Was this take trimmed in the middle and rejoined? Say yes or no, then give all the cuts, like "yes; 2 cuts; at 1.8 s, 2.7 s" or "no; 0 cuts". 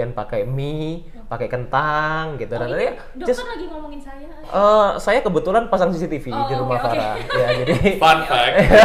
no; 0 cuts